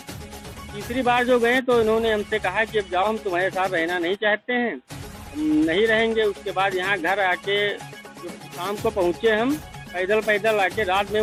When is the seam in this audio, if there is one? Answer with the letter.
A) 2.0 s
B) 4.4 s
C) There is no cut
C